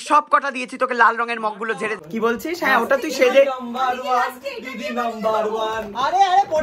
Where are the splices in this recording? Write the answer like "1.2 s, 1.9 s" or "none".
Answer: 2.0 s